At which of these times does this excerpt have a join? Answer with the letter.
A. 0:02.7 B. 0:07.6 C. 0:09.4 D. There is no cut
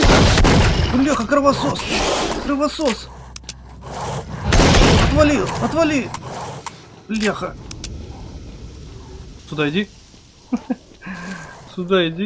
C